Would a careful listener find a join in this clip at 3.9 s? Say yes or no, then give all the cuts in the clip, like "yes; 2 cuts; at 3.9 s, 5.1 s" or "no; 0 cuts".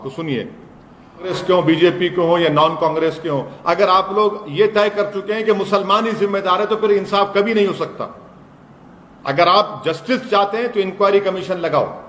no; 1 cut; at 1.3 s